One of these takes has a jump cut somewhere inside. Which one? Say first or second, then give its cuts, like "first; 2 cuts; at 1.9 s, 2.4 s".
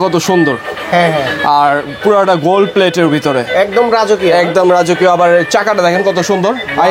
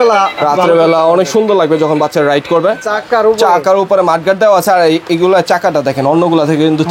second; 1 cut; at 2.8 s